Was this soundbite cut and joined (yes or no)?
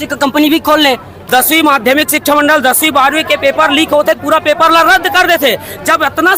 yes